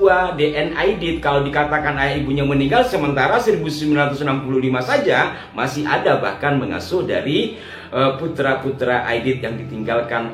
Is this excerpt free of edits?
yes; 0 cuts

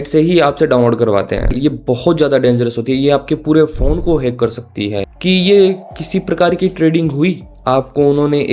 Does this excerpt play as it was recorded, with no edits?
no; 2 cuts; at 1.5 s, 5.1 s

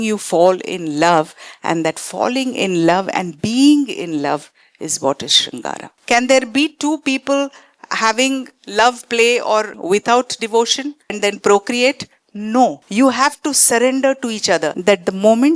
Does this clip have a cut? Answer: yes; 5 cuts; at 5.9 s, 9.8 s, 11.2 s, 12.8 s, 14.7 s

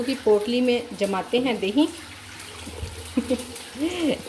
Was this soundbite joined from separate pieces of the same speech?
no; 0 cuts

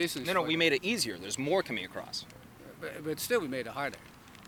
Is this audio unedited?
yes; 0 cuts

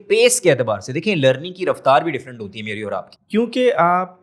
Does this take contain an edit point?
yes; 1 cut; at 3.1 s

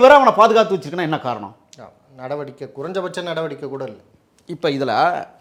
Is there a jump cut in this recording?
no; 0 cuts

